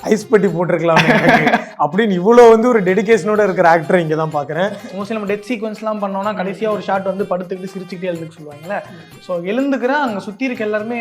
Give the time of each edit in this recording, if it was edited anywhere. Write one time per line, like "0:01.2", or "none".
0:04.7